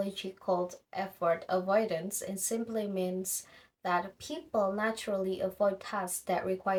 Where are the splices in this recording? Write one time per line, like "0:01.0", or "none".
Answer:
none